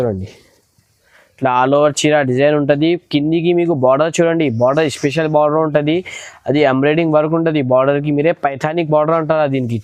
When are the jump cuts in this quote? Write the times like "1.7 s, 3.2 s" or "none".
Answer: none